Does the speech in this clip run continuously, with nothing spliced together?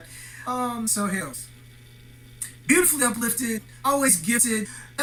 yes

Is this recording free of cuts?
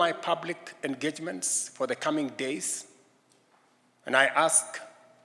yes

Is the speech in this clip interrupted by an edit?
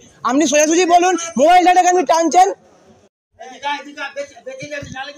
yes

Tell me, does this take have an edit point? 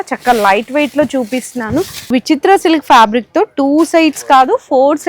yes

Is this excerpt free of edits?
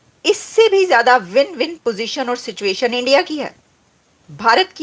yes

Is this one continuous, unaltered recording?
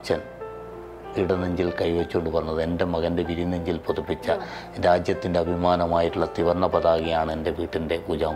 yes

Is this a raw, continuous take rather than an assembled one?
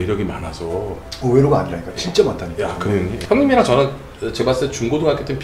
no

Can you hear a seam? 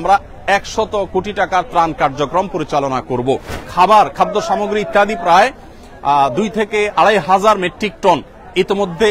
yes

